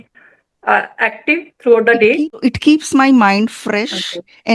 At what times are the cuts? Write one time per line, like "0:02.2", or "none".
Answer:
none